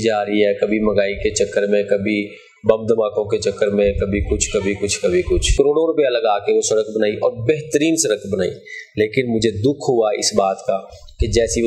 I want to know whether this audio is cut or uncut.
cut